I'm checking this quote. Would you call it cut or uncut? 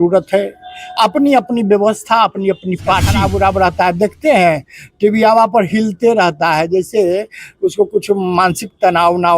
cut